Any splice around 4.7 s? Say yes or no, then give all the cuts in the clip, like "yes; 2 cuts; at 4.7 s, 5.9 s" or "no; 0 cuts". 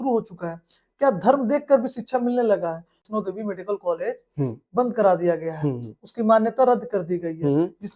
no; 1 cut; at 3.0 s